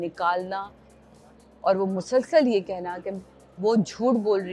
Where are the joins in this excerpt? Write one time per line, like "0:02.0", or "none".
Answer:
none